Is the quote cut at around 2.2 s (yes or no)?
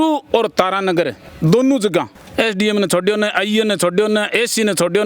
yes